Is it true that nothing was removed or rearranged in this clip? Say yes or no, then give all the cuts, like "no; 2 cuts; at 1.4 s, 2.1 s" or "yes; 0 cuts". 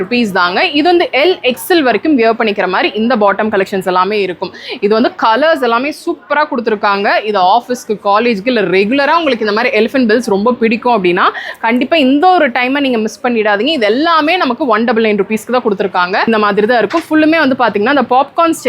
no; 1 cut; at 16.3 s